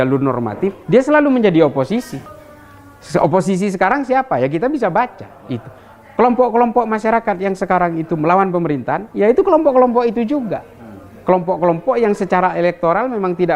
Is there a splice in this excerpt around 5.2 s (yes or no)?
no